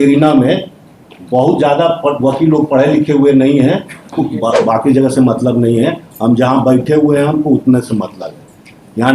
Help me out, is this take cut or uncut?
cut